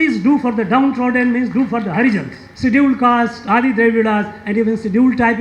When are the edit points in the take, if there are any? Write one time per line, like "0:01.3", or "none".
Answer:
0:02.4